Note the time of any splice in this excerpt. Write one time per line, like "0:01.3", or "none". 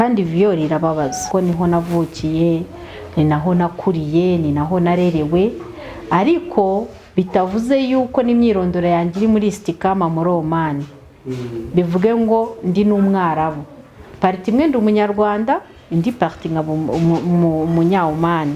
0:01.2